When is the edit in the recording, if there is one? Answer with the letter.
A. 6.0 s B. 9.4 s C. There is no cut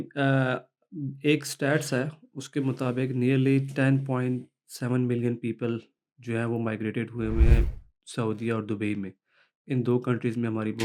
C